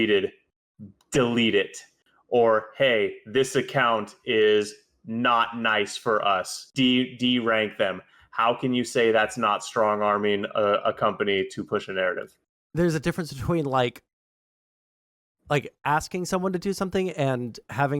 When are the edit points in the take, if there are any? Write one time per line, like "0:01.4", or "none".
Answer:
0:06.6